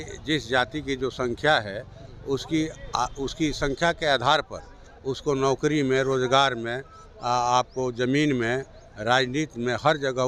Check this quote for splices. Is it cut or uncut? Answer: uncut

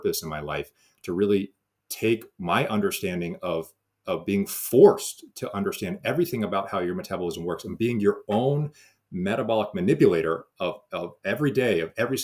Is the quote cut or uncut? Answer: uncut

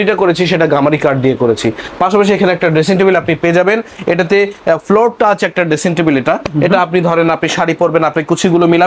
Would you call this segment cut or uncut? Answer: uncut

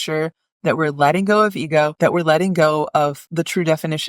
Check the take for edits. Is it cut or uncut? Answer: cut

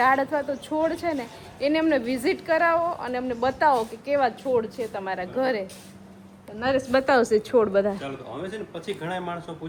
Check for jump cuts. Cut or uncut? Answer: uncut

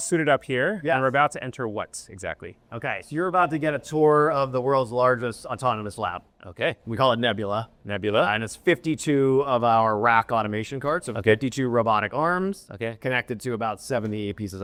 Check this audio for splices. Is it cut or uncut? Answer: uncut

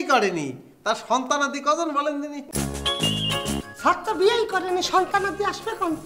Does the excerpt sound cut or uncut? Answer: cut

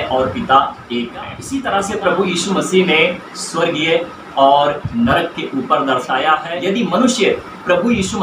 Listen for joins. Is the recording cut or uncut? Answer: cut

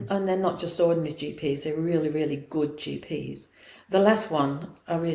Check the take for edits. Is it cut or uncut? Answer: uncut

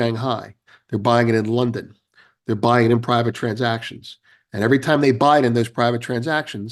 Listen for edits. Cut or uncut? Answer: uncut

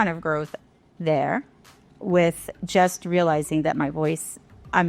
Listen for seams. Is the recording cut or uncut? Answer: cut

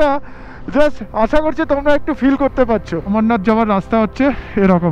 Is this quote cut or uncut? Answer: cut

